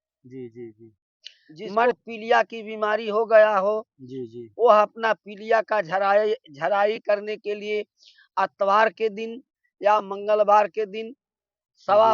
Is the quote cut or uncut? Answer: cut